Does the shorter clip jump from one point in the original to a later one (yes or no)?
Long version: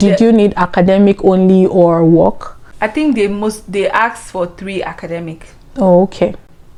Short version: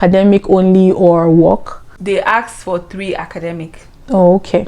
yes